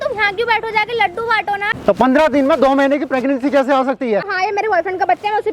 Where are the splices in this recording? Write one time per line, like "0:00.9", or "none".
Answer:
0:01.7
0:04.3